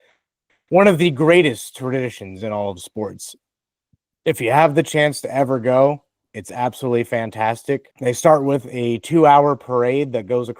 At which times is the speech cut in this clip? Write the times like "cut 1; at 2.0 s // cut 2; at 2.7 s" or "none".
cut 1; at 7.9 s